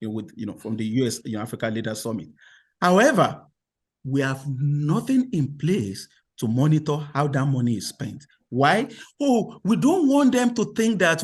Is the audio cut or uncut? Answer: uncut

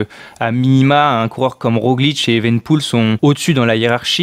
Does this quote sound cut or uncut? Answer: cut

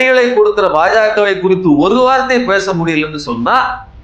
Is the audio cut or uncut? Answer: uncut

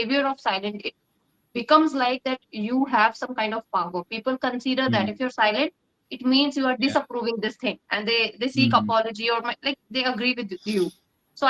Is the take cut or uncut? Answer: uncut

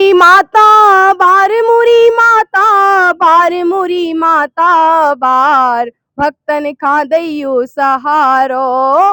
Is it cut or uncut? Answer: uncut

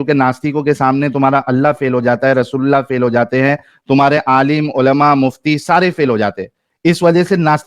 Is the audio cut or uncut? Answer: uncut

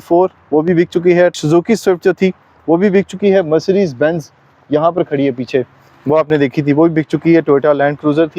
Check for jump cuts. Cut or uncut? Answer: uncut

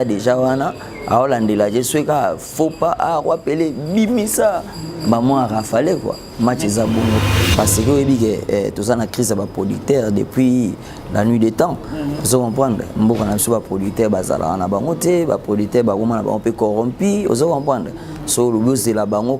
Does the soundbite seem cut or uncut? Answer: cut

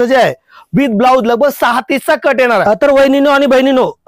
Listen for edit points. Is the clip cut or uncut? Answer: cut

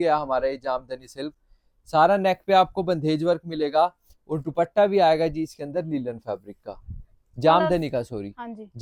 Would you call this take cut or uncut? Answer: uncut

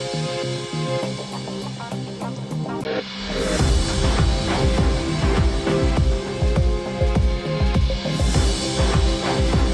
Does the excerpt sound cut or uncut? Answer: cut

